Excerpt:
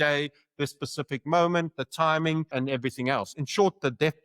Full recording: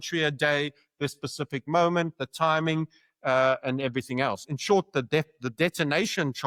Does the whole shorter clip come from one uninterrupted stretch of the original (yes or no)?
no